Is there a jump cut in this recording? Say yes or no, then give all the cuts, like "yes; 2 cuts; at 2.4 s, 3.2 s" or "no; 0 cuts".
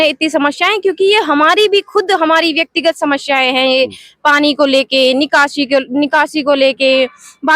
no; 0 cuts